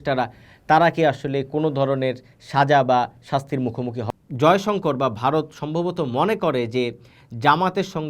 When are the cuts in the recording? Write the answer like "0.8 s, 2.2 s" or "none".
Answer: 4.0 s